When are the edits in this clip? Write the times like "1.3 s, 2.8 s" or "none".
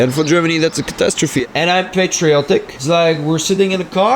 1.4 s, 2.7 s

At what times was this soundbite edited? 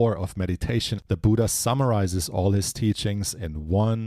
1.0 s

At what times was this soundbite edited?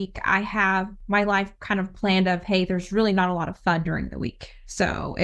1.0 s

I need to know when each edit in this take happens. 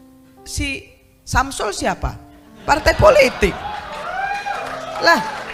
none

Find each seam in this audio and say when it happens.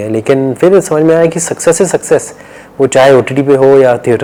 none

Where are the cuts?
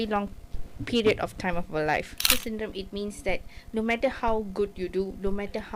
2.3 s

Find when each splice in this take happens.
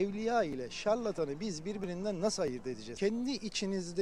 2.9 s

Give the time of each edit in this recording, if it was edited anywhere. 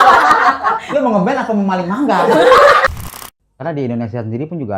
3.0 s

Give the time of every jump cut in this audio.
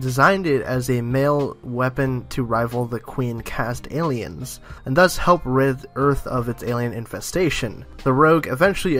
none

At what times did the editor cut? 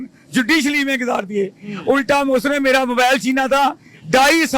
none

